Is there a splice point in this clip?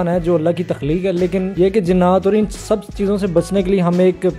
yes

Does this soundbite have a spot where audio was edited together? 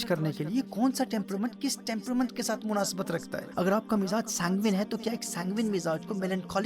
yes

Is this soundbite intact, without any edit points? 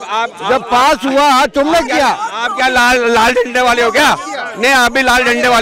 yes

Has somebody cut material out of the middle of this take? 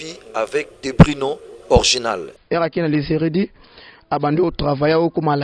yes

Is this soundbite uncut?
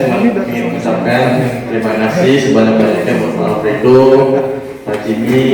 yes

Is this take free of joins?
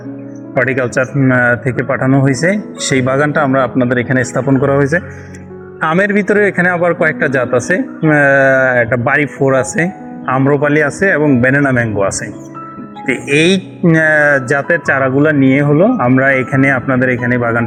yes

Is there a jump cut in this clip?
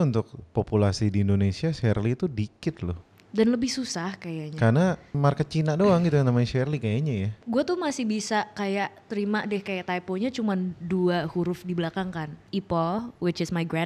yes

